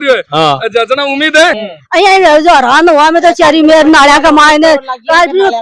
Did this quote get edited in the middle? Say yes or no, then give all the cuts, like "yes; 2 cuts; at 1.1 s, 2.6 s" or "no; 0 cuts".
yes; 1 cut; at 1.5 s